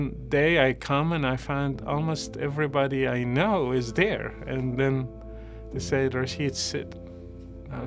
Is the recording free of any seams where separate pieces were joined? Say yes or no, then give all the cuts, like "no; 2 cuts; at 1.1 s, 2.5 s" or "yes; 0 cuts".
yes; 0 cuts